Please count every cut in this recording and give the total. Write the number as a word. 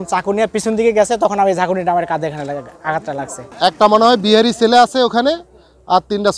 one